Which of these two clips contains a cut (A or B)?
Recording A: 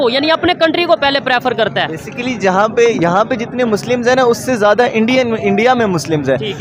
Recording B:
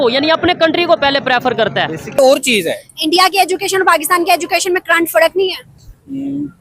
B